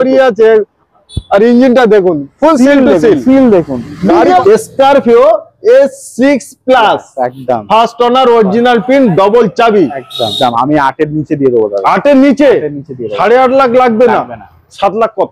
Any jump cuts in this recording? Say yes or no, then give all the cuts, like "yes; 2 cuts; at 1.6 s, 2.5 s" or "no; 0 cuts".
yes; 2 cuts; at 4.4 s, 10.3 s